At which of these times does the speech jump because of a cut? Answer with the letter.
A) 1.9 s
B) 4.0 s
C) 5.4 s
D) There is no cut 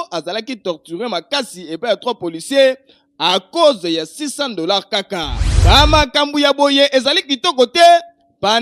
C